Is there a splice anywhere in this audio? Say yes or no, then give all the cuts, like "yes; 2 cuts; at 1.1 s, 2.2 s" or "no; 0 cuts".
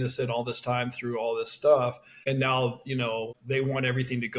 yes; 2 cuts; at 2.1 s, 3.4 s